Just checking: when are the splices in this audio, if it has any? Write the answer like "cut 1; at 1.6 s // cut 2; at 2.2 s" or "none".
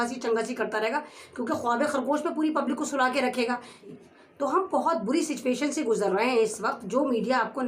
cut 1; at 3.8 s